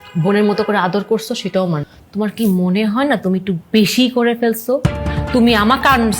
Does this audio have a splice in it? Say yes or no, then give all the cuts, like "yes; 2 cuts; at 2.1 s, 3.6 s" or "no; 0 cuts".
yes; 1 cut; at 1.9 s